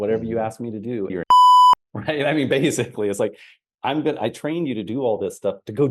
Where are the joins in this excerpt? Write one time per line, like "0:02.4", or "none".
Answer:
0:01.1